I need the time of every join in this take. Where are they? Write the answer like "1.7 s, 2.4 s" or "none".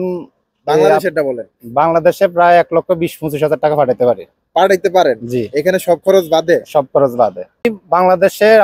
7.6 s